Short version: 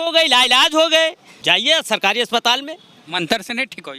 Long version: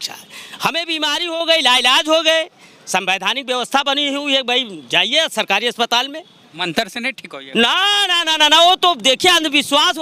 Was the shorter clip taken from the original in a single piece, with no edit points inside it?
no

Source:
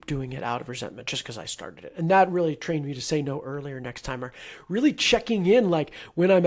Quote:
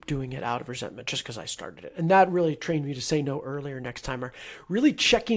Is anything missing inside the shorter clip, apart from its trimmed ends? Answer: no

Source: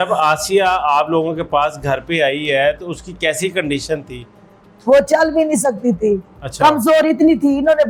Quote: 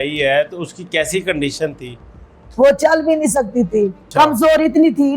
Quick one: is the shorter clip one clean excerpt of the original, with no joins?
no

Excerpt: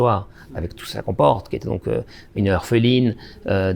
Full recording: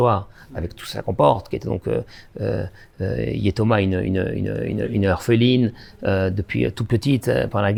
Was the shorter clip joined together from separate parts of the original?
yes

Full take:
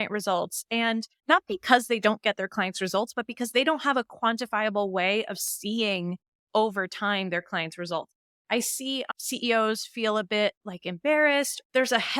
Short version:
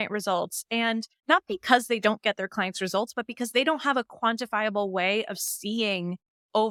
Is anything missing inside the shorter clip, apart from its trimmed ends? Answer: no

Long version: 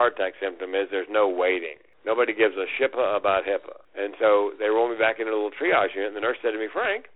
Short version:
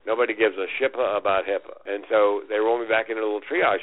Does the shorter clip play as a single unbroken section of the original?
no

